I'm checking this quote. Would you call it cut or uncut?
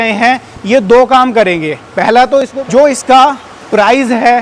cut